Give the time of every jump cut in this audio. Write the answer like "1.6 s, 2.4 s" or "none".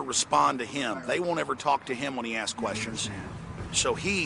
2.2 s